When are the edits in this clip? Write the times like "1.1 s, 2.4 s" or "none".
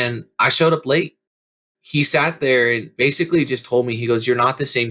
1.2 s, 2.9 s